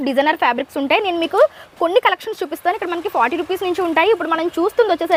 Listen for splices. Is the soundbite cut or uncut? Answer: uncut